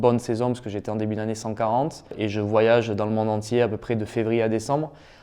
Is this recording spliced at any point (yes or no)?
yes